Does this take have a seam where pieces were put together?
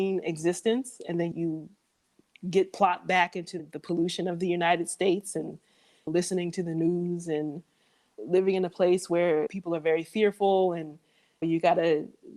yes; 2 cuts; at 1.3 s, 3.6 s

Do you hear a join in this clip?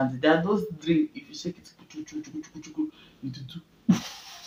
no; 0 cuts

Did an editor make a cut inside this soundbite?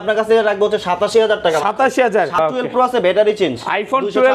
yes; 1 cut; at 2.3 s

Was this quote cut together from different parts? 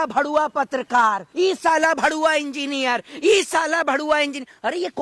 yes; 1 cut; at 1.2 s

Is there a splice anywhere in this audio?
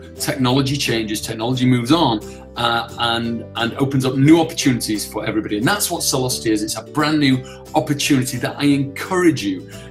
no; 0 cuts

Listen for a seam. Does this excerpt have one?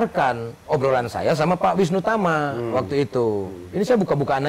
no; 0 cuts

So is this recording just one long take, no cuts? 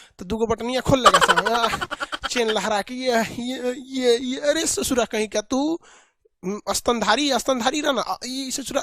yes; 0 cuts

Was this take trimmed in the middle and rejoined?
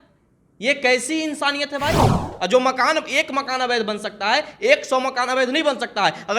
yes; 1 cut; at 2.3 s

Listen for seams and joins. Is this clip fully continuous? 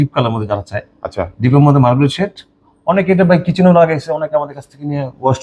yes; 0 cuts

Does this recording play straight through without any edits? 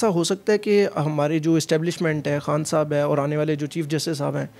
yes; 0 cuts

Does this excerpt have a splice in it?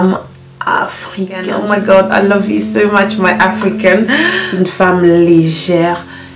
yes; 2 cuts; at 1.5 s, 4.3 s

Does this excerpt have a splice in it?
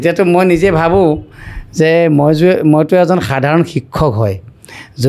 no; 0 cuts

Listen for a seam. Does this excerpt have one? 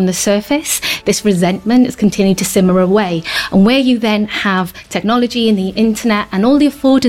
yes; 1 cut; at 1.0 s

